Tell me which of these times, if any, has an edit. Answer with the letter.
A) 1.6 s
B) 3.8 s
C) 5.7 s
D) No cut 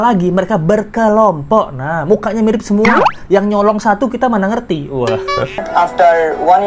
C